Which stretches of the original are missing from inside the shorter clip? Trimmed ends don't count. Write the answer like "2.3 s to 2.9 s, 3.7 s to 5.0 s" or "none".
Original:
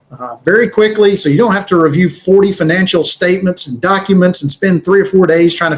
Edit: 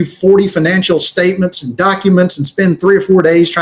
none